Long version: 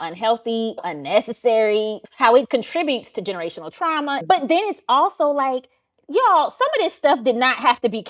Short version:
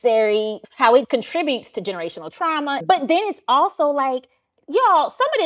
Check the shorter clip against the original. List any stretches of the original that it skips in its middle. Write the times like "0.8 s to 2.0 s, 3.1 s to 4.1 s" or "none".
none